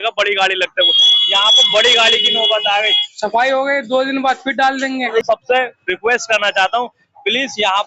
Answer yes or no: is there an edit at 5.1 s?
yes